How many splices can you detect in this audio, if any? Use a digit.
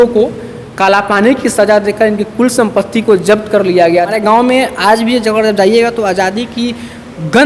1